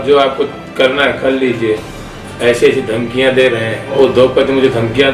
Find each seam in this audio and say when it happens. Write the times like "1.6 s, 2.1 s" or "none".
3.9 s